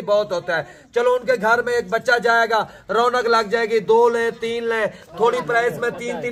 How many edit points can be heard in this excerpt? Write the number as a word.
zero